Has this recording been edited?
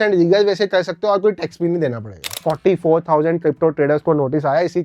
yes; 1 cut; at 2.4 s

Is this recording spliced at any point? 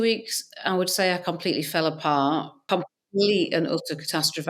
yes; 1 cut; at 2.7 s

